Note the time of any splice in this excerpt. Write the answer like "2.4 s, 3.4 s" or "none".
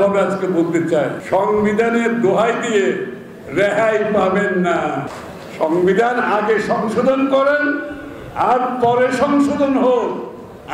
1.2 s, 5.2 s